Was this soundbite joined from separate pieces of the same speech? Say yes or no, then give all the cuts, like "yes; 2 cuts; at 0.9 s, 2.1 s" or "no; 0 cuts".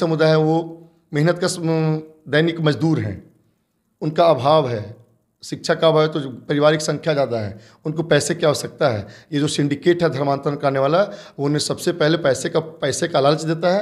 no; 0 cuts